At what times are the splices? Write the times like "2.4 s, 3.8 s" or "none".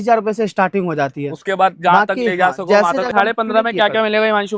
3.1 s

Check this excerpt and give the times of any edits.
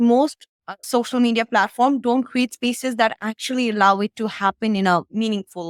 none

